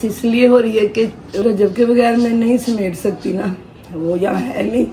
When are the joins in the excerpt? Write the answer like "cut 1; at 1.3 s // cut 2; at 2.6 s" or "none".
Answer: cut 1; at 1.4 s